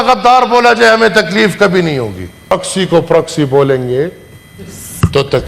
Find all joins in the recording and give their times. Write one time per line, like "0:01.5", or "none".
0:02.5